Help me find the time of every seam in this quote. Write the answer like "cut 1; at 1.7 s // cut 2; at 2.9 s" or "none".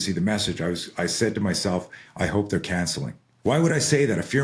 cut 1; at 3.2 s

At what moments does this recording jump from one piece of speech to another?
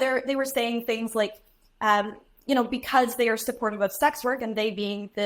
none

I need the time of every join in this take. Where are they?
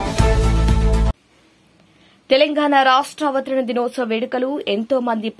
cut 1; at 1.2 s

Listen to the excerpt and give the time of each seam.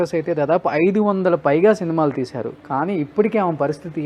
none

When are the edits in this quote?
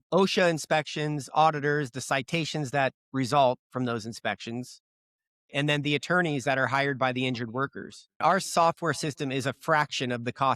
cut 1; at 8.2 s

